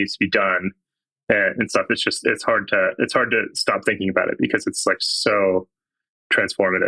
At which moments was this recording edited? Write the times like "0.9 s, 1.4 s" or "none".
none